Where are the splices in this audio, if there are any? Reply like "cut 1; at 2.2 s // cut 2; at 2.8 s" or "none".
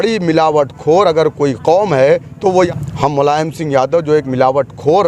cut 1; at 2.7 s